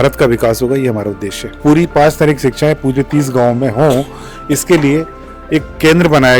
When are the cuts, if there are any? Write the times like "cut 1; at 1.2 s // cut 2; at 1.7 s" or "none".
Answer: cut 1; at 1.6 s

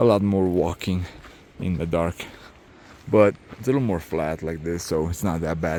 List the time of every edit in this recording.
none

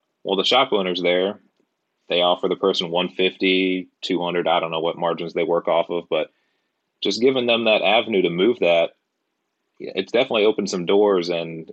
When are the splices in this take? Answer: none

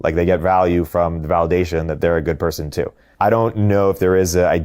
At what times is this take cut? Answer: cut 1; at 3.0 s

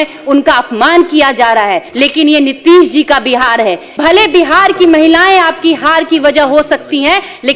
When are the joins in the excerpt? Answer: cut 1; at 1.9 s // cut 2; at 4.0 s

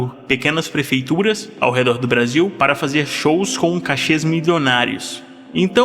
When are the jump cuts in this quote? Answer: cut 1; at 1.5 s // cut 2; at 2.5 s

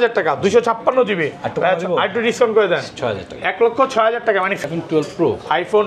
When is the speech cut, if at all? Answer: cut 1; at 4.6 s

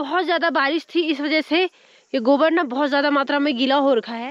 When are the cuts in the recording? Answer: none

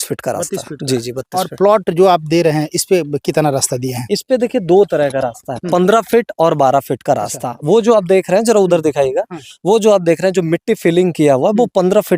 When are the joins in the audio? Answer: none

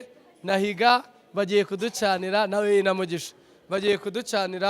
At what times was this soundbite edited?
none

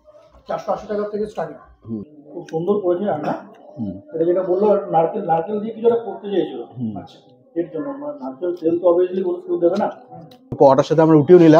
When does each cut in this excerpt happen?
cut 1; at 2.1 s // cut 2; at 10.6 s

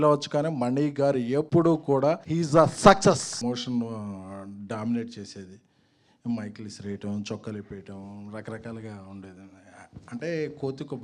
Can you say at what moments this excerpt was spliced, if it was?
cut 1; at 1.5 s // cut 2; at 2.3 s // cut 3; at 3.4 s

